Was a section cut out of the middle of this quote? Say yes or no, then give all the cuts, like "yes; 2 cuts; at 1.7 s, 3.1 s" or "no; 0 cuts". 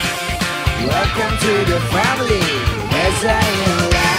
no; 0 cuts